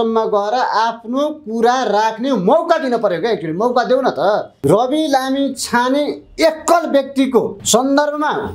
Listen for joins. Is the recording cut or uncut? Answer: cut